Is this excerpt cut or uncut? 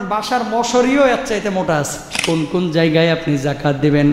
cut